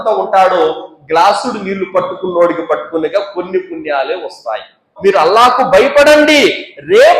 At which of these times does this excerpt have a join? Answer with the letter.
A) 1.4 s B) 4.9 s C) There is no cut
B